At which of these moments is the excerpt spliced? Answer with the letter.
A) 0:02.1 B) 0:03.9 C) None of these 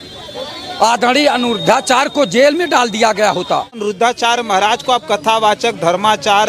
B